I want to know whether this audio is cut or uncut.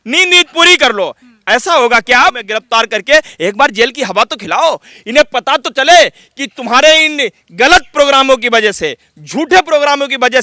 cut